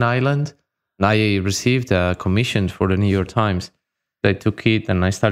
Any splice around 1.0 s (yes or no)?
yes